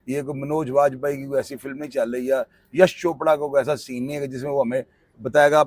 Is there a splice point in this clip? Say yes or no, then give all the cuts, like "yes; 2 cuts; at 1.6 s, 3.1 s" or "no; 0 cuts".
no; 0 cuts